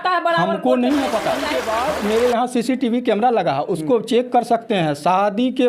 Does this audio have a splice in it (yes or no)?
yes